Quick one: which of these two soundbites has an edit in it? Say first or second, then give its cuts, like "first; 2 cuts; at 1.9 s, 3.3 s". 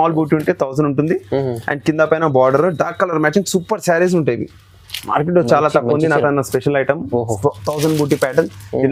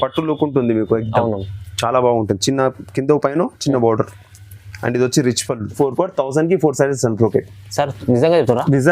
second; 1 cut; at 5.7 s